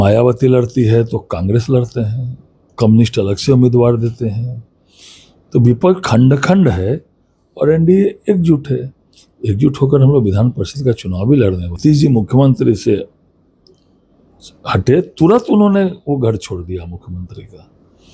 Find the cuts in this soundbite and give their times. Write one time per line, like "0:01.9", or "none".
0:11.7